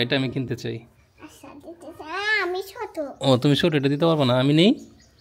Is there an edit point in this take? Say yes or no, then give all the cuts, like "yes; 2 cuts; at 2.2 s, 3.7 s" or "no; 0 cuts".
no; 0 cuts